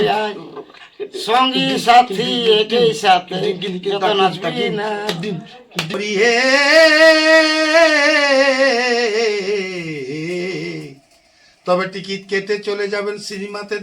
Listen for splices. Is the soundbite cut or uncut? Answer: cut